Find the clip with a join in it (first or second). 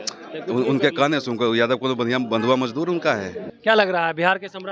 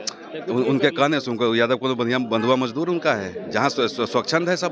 first